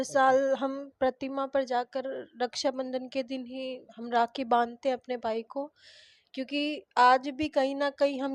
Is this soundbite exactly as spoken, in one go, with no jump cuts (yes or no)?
yes